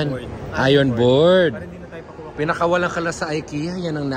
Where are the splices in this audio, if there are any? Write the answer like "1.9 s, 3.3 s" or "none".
none